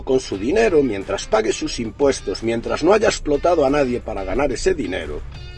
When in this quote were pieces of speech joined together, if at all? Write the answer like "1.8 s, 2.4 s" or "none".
none